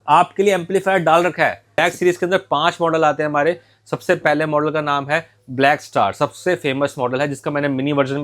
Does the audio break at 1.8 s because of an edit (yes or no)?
yes